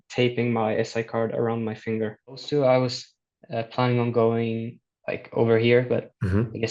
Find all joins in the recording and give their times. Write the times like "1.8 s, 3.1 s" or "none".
2.4 s